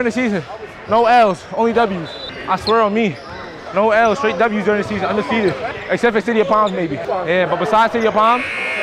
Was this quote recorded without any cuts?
no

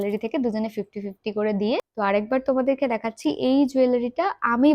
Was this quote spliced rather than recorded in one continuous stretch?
yes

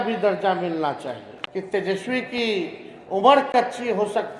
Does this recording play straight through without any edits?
no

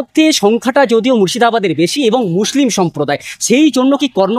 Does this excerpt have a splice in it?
no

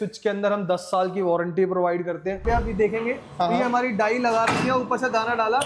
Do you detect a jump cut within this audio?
yes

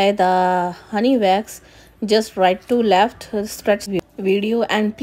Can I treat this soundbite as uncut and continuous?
no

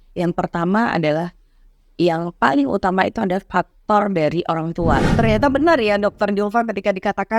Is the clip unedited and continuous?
no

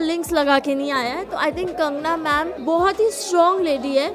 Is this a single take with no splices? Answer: no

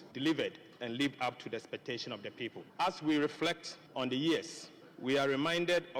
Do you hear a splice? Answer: no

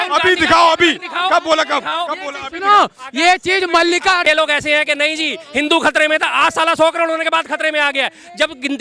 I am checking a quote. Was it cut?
yes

